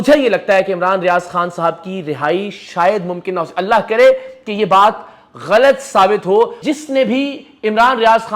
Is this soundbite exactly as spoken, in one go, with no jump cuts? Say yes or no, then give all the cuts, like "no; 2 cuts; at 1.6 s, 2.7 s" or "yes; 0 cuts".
no; 1 cut; at 6.6 s